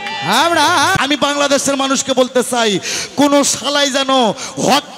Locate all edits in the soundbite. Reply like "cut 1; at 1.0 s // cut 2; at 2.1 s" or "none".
cut 1; at 1.0 s